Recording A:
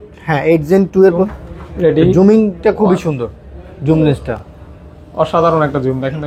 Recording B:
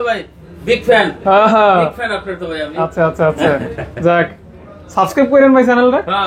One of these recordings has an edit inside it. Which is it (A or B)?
A